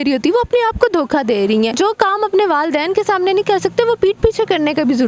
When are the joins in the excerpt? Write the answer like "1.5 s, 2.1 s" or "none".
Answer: 1.7 s

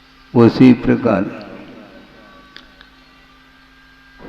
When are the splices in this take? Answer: 1.1 s

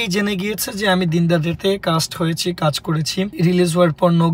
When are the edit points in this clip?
3.3 s

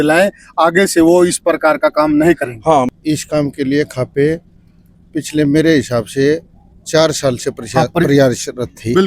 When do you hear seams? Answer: 2.9 s

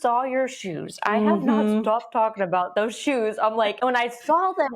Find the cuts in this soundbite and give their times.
2.7 s, 3.8 s

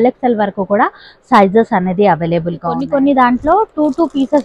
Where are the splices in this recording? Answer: 2.7 s

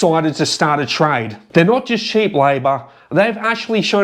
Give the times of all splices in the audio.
1.3 s

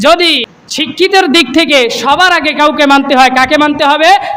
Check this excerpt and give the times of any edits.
1.0 s

